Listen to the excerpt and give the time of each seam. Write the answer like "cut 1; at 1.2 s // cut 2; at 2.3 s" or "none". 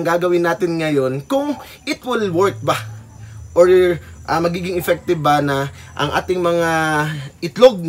none